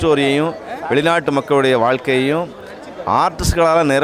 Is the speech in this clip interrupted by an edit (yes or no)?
no